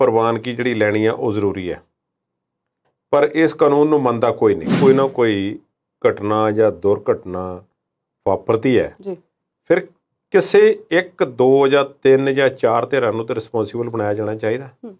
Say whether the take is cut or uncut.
cut